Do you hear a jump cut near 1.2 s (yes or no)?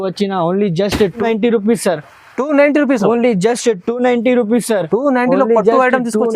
yes